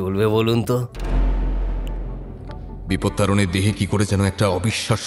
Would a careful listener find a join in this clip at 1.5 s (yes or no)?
no